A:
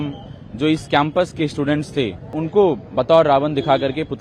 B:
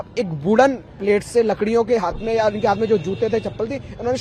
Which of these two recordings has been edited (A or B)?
A